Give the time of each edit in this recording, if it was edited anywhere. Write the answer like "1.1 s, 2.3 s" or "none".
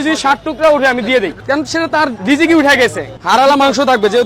1.9 s, 3.1 s